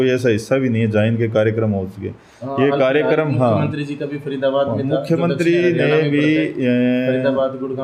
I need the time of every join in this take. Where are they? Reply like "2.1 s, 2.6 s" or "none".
none